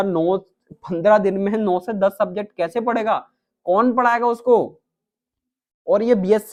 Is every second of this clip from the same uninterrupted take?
yes; 0 cuts

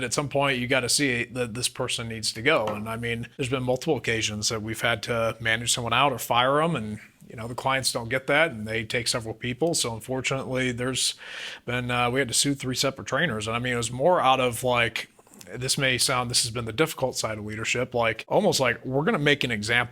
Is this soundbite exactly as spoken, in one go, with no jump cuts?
no; 2 cuts; at 3.3 s, 18.2 s

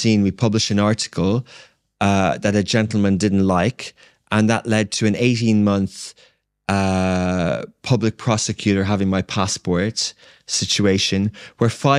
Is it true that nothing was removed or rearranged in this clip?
yes; 0 cuts

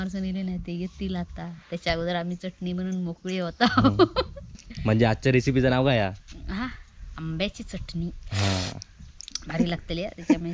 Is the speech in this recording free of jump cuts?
no; 1 cut; at 4.5 s

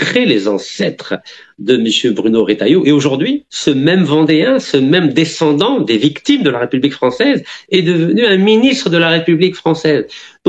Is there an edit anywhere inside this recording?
yes; 1 cut; at 3.5 s

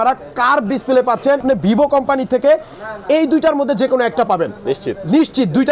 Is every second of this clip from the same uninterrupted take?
no; 1 cut; at 1.4 s

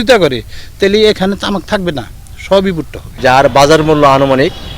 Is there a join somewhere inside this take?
yes; 1 cut; at 3.0 s

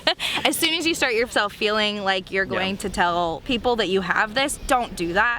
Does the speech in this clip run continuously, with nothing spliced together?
no; 1 cut; at 3.4 s

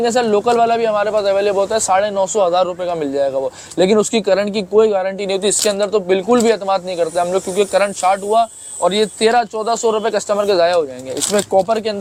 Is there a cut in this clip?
no; 0 cuts

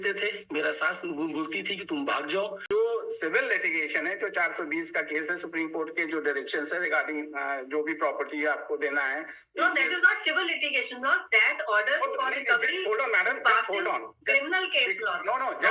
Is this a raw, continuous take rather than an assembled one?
no; 1 cut; at 2.6 s

